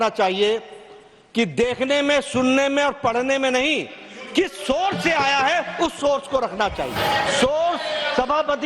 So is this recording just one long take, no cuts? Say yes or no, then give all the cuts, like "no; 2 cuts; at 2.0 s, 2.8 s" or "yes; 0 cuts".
no; 1 cut; at 7.0 s